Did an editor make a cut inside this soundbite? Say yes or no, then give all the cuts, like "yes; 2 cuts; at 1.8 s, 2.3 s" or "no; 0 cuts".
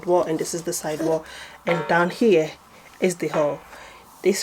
no; 0 cuts